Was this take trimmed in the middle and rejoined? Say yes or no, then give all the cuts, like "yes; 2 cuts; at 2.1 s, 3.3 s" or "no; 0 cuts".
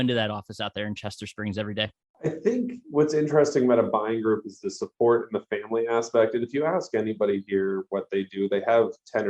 yes; 1 cut; at 2.0 s